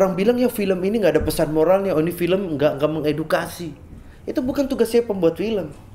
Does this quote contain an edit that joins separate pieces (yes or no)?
no